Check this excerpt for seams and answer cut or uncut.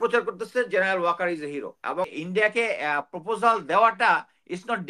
cut